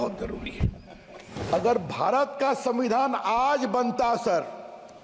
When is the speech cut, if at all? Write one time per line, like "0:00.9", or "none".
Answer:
0:01.4